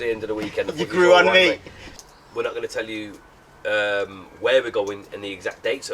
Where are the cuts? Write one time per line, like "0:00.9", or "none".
0:02.0